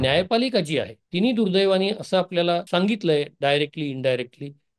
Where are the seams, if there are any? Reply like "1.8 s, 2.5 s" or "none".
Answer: 1.0 s, 2.7 s